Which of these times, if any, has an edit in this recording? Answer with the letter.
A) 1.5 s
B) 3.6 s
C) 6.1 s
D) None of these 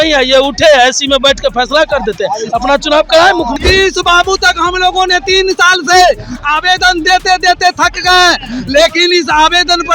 B